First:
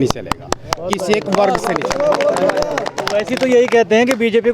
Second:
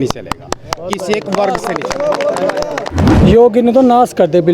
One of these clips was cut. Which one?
second; 1 cut; at 3.0 s

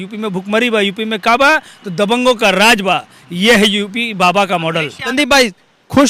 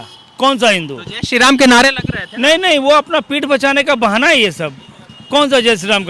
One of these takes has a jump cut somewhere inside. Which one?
first; 1 cut; at 5.1 s

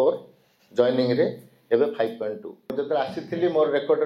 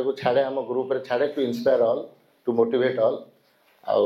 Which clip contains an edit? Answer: first; 1 cut; at 2.8 s

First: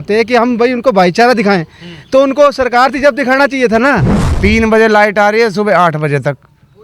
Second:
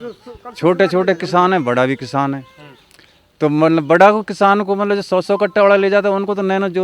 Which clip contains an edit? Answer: first; 1 cut; at 4.2 s

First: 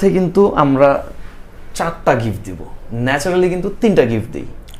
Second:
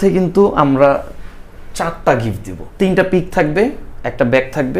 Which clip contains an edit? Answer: second; 1 cut; at 2.6 s

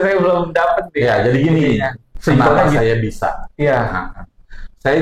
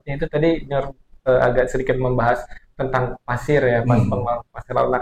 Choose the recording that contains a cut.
first; 1 cut; at 2.8 s

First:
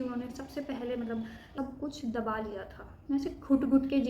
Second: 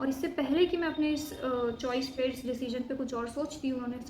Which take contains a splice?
first; 1 cut; at 1.5 s

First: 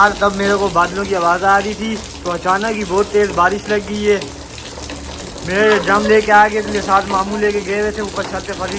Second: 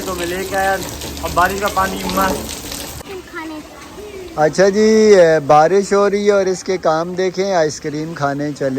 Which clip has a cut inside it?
second; 1 cut; at 3.0 s

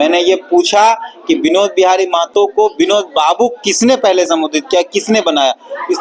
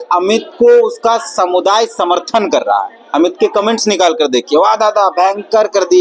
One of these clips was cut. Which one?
second; 1 cut; at 3.0 s

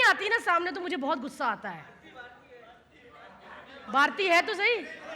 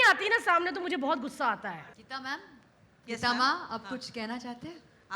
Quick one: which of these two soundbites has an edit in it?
second; 1 cut; at 2.0 s

